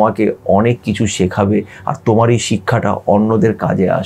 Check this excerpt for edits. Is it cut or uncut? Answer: uncut